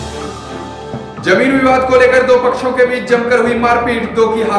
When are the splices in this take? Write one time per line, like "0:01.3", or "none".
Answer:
0:01.1

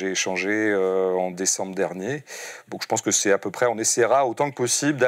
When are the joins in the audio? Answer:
none

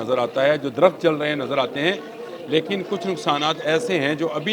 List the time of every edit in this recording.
none

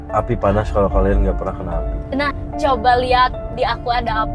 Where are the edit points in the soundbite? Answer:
0:02.3

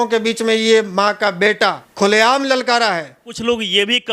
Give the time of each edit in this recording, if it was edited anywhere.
0:01.8
0:03.3

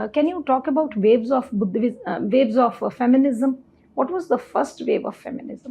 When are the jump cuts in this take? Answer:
none

